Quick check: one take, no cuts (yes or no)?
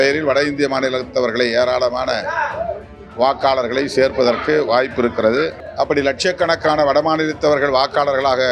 no